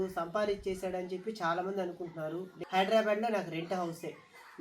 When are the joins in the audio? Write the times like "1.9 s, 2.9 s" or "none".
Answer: 2.5 s